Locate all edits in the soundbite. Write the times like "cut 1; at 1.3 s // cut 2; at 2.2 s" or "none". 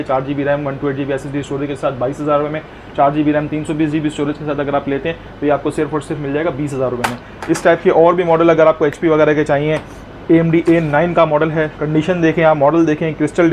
none